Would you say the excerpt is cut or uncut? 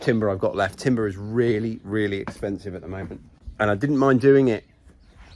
uncut